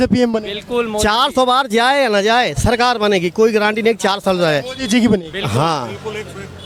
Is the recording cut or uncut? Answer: uncut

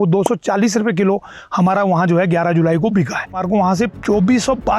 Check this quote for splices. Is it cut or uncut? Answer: cut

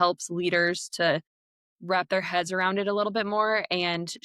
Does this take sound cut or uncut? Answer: uncut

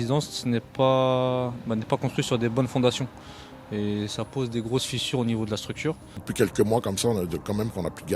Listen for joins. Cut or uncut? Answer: cut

